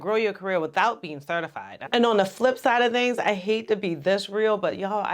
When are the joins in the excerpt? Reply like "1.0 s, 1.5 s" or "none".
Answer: 1.8 s